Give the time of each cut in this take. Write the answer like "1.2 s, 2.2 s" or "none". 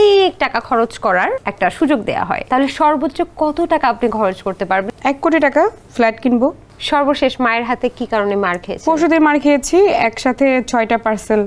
1.5 s, 2.4 s, 4.9 s, 5.8 s, 6.7 s